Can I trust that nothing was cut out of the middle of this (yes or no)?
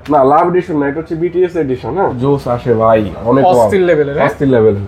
no